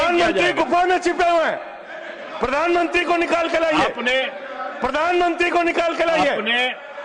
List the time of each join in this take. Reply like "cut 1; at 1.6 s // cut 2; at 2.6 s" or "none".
none

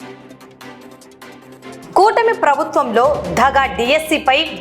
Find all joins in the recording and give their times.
cut 1; at 1.8 s

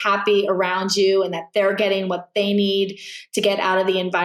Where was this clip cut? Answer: none

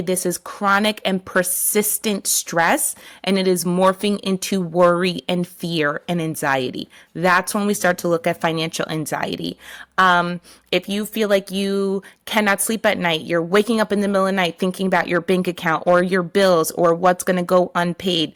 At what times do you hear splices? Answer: none

